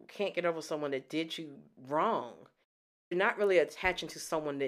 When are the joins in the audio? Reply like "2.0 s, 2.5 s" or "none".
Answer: 3.1 s